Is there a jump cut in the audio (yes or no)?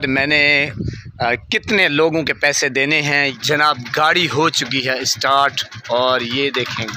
yes